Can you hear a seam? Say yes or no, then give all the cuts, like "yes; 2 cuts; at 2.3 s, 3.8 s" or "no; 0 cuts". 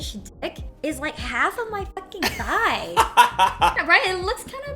yes; 1 cut; at 3.8 s